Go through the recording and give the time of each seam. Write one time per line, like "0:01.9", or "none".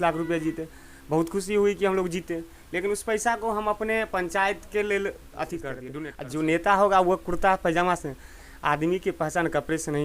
0:05.9